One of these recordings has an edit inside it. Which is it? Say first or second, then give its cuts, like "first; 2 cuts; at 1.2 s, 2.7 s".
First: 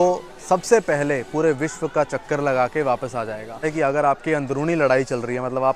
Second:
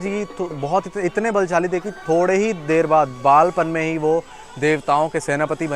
first; 1 cut; at 3.6 s